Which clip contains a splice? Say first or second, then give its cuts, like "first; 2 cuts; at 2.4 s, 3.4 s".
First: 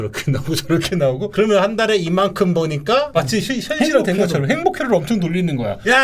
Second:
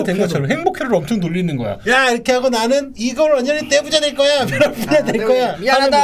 first; 2 cuts; at 1.3 s, 3.1 s